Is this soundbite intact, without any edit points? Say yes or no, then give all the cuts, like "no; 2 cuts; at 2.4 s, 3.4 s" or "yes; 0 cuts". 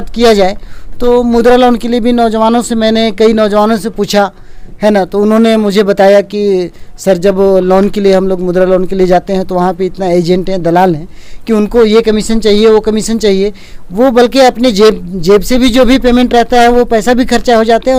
yes; 0 cuts